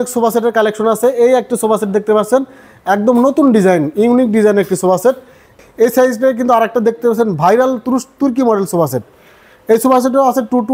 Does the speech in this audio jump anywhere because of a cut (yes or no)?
yes